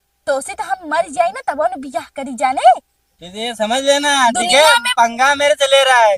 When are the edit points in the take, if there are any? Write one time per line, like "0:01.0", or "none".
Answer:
none

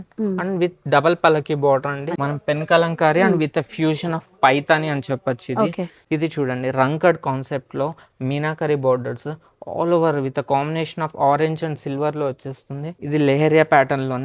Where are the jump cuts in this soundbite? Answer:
0:02.1
0:06.0
0:12.9

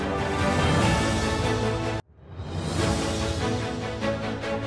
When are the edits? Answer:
none

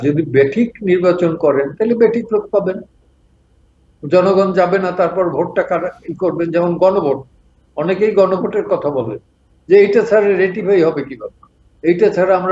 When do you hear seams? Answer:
none

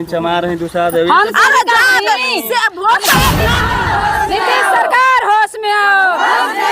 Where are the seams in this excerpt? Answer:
0:03.6

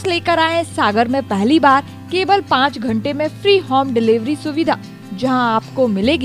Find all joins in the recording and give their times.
none

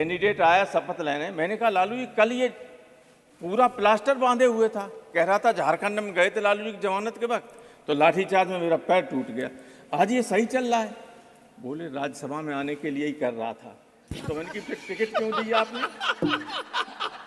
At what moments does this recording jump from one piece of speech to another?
none

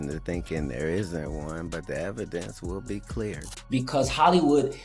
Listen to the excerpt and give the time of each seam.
0:03.6

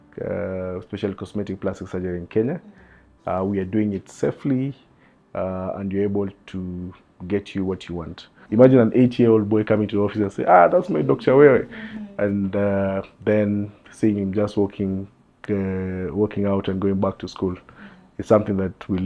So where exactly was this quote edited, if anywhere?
0:08.4

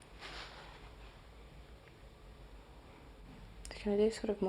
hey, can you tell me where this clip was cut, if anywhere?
0:03.2

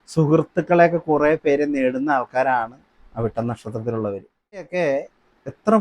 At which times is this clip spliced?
0:04.7

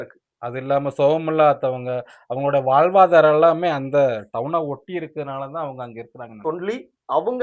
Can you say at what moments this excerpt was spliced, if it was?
0:06.4

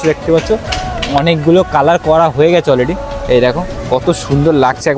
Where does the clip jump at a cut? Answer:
none

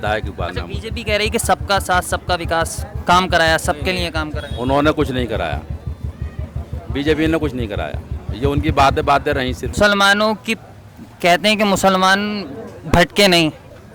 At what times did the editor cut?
0:09.7

